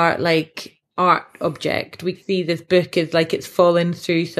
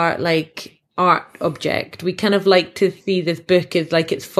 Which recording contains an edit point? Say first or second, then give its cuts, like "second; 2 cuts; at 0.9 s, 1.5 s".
first; 1 cut; at 2.2 s